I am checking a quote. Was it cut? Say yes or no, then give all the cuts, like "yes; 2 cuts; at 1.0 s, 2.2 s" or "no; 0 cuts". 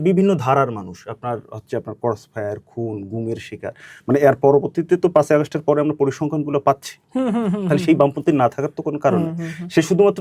no; 0 cuts